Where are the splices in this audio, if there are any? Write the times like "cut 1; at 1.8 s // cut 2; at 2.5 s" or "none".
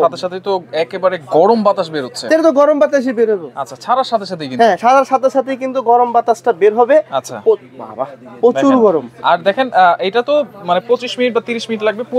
none